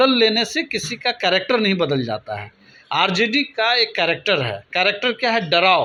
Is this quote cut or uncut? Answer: uncut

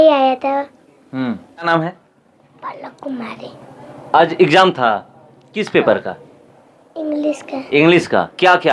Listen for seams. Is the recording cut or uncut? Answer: cut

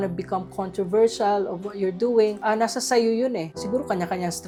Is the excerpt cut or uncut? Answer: uncut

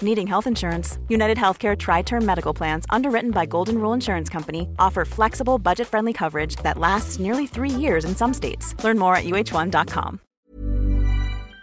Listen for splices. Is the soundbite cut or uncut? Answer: cut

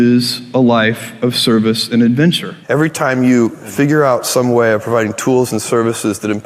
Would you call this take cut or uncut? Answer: cut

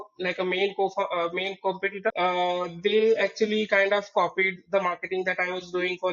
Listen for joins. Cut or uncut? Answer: cut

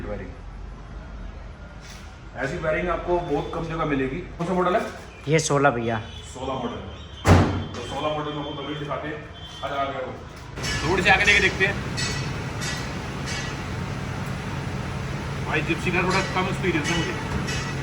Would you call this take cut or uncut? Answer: cut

